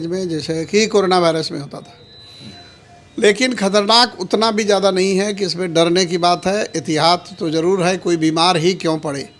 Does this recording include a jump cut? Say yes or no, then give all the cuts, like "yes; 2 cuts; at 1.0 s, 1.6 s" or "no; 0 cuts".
no; 0 cuts